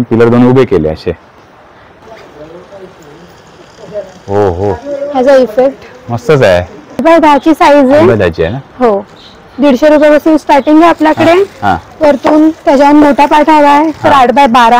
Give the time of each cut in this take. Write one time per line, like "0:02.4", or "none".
0:02.0
0:07.0